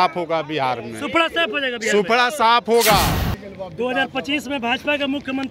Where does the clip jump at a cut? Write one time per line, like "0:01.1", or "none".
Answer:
0:03.3